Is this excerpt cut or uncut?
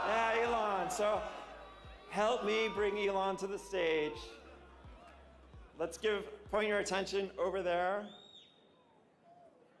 uncut